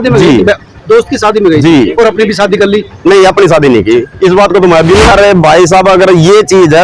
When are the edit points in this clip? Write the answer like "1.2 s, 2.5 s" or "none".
5.1 s